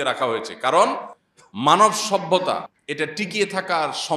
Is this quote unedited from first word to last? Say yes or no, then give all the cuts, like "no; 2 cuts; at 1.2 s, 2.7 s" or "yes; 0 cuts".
no; 2 cuts; at 1.8 s, 3.1 s